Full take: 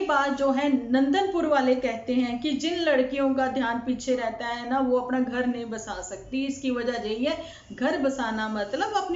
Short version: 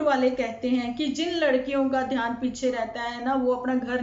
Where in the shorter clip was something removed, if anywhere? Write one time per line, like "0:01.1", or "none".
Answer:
none